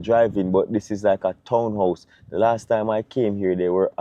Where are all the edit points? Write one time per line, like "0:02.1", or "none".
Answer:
none